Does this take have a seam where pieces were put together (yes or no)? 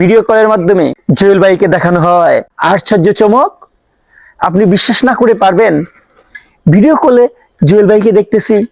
yes